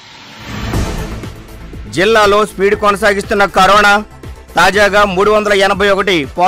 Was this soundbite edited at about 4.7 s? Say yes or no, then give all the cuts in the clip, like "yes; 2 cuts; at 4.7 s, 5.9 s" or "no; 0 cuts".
no; 1 cut; at 1.1 s